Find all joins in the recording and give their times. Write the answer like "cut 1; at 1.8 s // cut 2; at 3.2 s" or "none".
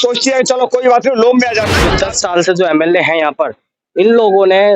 cut 1; at 1.7 s